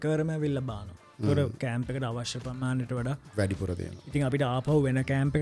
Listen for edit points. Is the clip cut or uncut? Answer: uncut